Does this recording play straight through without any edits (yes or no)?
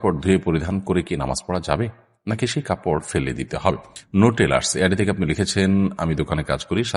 no